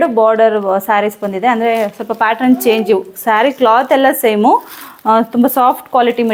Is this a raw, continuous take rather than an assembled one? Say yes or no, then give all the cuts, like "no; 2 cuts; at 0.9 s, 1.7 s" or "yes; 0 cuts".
yes; 0 cuts